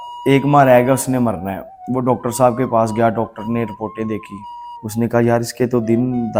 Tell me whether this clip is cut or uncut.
uncut